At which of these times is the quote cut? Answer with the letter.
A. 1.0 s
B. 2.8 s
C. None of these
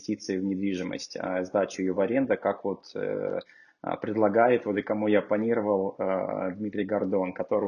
C